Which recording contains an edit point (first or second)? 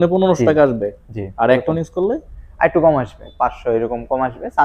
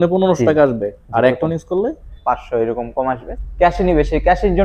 second